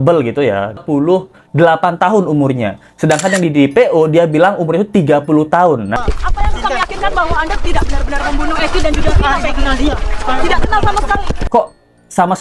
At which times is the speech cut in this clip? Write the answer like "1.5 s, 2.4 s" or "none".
0.8 s, 5.9 s, 11.3 s